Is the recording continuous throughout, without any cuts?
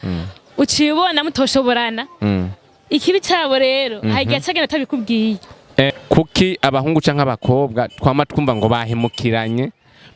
no; 1 cut; at 5.9 s

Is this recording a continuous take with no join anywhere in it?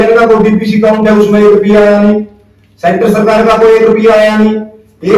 yes; 0 cuts

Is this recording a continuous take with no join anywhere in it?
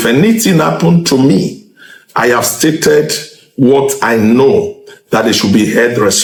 yes; 0 cuts

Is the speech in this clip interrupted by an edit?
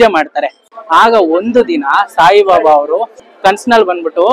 yes; 1 cut; at 3.2 s

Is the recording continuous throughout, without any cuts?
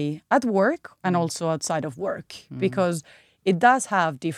yes; 0 cuts

